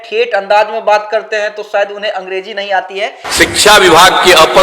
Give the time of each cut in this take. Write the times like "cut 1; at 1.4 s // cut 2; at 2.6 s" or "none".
cut 1; at 3.2 s